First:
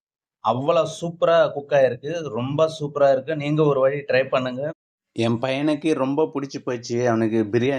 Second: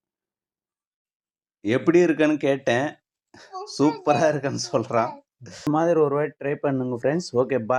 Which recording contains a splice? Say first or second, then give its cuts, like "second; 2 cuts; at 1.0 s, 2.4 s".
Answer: second; 1 cut; at 5.7 s